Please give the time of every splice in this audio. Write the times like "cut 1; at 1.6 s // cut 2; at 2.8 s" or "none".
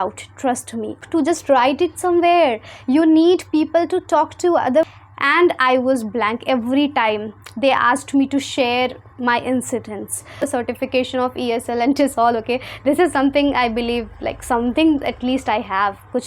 cut 1; at 1.0 s // cut 2; at 4.9 s // cut 3; at 10.5 s